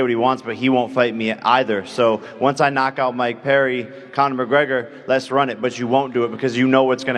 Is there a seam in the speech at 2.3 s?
yes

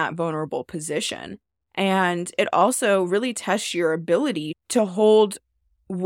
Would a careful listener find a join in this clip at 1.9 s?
no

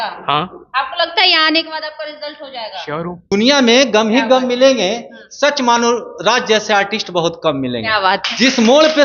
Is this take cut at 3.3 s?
yes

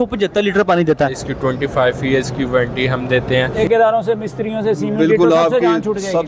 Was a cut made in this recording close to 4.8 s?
no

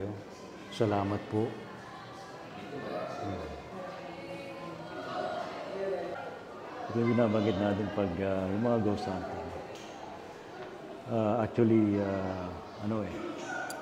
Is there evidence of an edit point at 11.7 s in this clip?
no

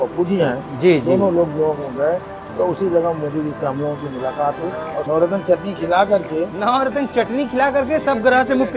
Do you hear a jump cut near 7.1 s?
no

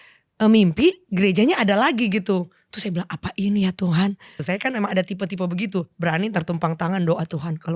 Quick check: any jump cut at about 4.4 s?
yes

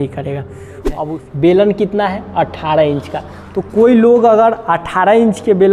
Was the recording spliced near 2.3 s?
no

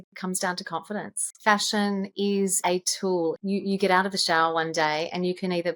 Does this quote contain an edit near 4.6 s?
no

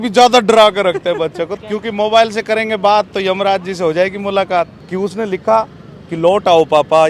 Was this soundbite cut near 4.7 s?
yes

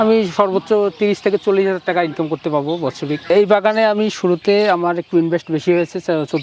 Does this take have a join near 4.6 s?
no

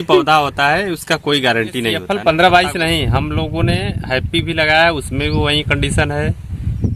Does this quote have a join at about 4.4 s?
no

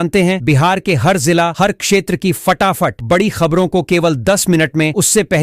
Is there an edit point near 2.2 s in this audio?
no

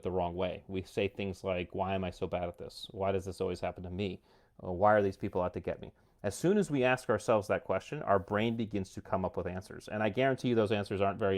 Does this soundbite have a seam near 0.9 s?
no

